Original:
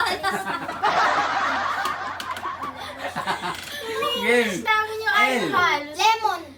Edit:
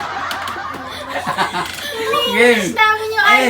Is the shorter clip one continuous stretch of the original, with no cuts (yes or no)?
no